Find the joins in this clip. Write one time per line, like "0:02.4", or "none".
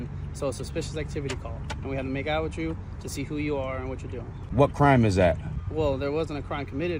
0:04.4
0:05.6